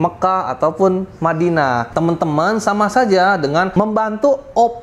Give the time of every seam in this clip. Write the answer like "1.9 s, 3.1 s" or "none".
1.9 s, 3.7 s